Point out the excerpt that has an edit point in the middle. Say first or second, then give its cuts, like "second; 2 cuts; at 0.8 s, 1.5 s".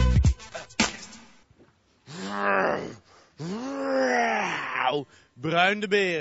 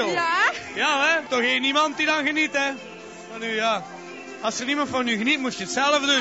second; 1 cut; at 2.3 s